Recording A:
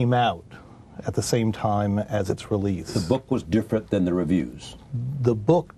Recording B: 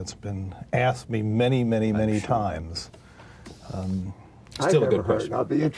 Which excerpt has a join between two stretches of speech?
A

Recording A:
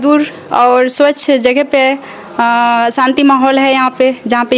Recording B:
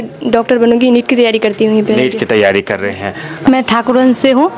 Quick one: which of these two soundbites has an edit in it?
B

